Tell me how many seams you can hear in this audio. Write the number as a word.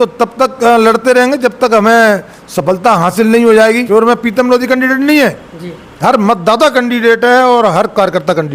one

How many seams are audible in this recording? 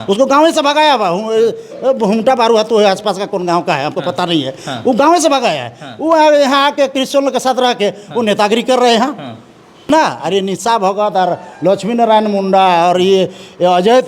one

